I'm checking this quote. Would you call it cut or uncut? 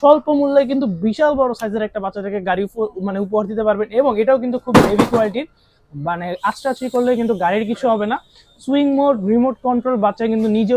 uncut